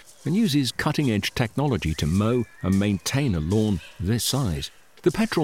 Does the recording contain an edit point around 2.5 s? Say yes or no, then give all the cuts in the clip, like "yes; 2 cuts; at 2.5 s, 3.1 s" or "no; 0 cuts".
no; 0 cuts